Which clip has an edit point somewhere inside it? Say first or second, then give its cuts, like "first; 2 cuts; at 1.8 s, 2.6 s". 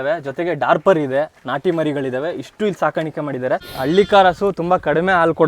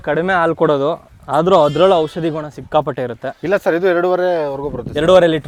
first; 1 cut; at 3.7 s